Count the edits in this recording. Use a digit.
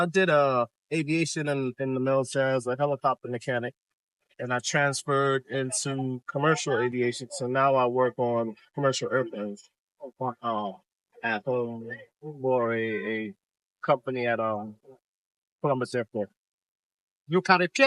0